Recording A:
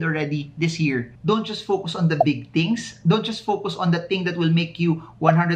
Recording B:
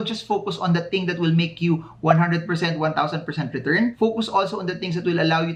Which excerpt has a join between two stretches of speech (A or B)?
A